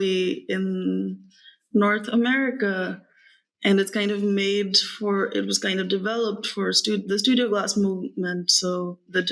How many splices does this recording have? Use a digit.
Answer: 0